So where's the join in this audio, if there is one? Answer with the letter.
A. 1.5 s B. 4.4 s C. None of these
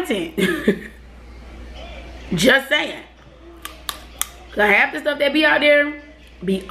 C